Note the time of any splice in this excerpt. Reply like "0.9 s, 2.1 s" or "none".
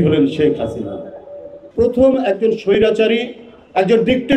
1.6 s